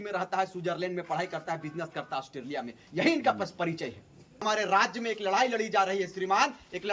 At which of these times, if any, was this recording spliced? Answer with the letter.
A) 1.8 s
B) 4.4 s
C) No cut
B